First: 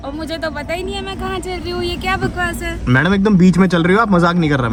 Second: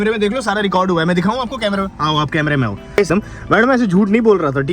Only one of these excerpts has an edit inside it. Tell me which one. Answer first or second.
second